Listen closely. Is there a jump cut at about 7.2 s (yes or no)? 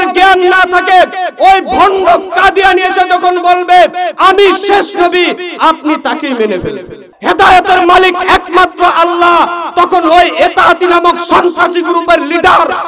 yes